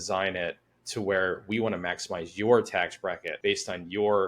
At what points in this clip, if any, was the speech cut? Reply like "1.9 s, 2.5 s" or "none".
3.3 s